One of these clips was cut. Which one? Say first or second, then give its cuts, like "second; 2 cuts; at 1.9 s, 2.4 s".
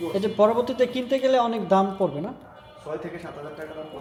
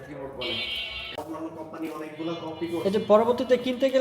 second; 1 cut; at 1.2 s